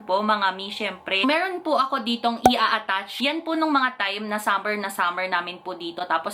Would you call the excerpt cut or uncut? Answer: uncut